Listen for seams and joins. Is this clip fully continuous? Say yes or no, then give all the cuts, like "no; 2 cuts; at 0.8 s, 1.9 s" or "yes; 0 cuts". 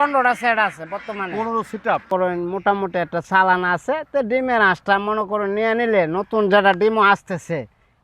no; 1 cut; at 2.1 s